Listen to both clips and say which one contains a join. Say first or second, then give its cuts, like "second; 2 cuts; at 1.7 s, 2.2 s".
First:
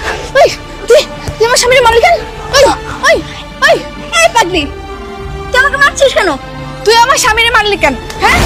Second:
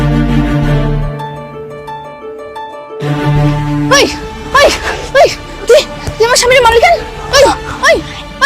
second; 1 cut; at 3.5 s